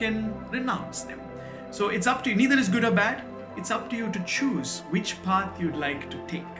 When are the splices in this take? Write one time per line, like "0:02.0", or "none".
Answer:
none